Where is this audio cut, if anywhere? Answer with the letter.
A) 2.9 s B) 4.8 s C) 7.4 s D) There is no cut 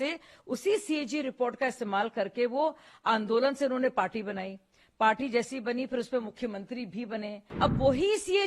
C